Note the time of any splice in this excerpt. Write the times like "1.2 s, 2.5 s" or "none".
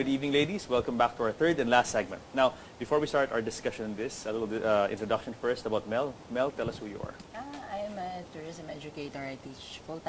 5.8 s